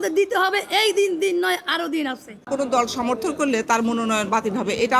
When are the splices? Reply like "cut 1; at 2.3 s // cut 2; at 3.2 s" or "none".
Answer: cut 1; at 2.5 s